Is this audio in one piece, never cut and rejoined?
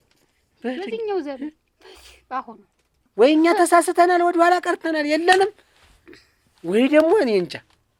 yes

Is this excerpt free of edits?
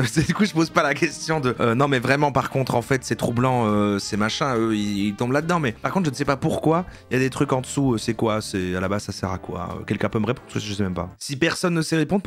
no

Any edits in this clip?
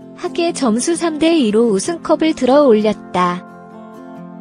no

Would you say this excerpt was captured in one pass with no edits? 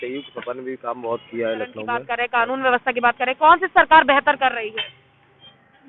no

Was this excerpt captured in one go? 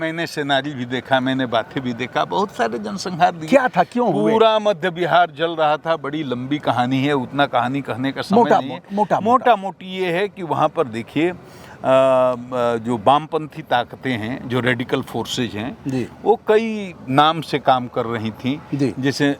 yes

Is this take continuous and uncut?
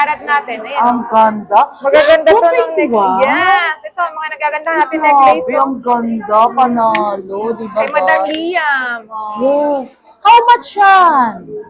yes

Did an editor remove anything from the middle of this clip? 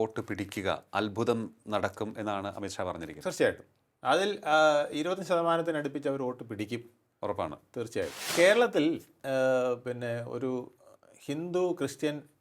yes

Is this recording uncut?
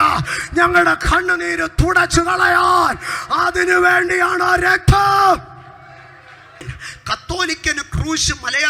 no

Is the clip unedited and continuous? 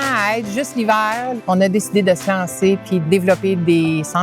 no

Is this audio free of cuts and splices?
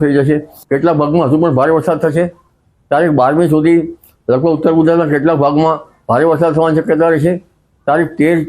yes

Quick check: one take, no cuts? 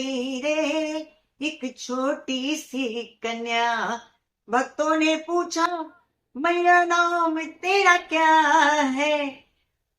yes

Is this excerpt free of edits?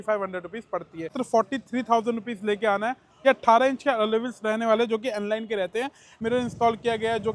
no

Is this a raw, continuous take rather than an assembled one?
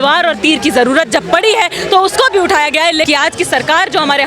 no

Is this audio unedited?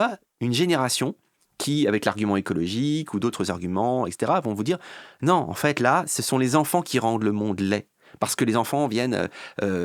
yes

